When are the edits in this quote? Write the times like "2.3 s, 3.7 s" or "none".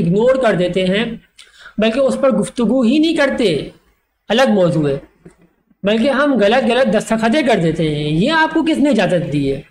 none